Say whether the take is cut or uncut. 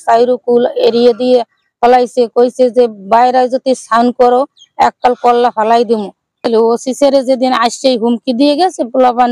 cut